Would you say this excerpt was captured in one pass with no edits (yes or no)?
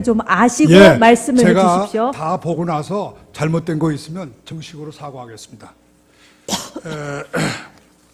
no